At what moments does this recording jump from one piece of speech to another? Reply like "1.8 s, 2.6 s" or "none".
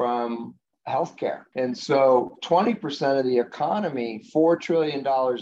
1.4 s